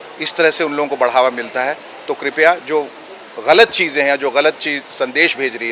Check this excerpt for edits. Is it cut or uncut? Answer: uncut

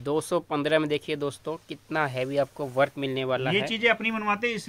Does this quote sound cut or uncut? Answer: uncut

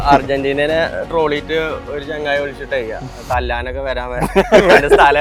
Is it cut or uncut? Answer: uncut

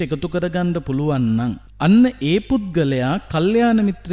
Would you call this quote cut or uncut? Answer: cut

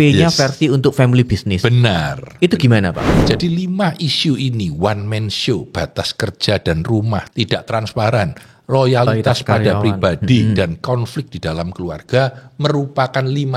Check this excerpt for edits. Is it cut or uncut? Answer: cut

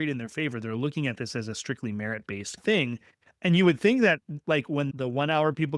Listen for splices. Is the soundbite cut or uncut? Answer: cut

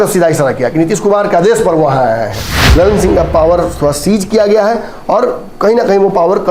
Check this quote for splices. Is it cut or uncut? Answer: cut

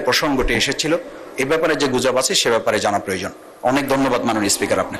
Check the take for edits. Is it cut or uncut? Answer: uncut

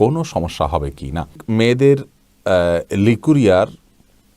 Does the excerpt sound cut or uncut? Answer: cut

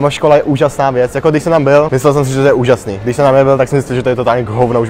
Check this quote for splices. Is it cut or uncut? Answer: cut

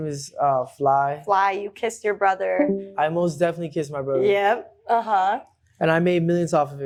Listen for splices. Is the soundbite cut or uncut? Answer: uncut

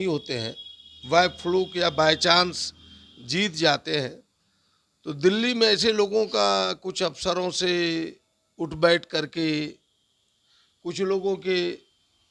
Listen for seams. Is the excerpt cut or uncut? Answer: uncut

